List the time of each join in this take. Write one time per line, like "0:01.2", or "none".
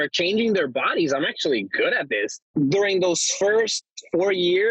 0:02.4